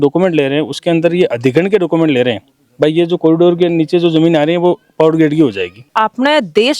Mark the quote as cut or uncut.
uncut